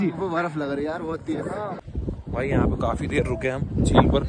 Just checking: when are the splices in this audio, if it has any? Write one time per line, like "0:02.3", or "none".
0:01.8